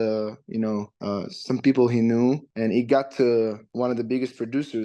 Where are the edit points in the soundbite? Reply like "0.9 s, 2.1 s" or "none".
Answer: 0.9 s, 2.5 s, 3.6 s